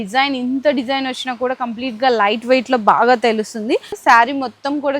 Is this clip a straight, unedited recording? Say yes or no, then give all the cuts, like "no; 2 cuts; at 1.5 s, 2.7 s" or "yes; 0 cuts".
no; 1 cut; at 3.9 s